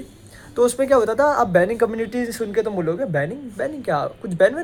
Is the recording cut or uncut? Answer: uncut